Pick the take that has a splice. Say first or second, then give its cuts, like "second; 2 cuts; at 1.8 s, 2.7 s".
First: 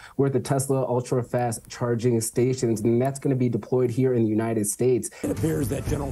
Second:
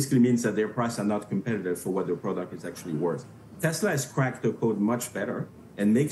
first; 1 cut; at 5.1 s